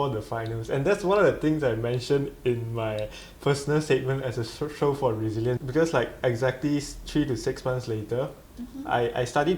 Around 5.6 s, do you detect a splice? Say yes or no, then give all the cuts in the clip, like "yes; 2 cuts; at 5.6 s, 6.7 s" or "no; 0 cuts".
yes; 1 cut; at 5.6 s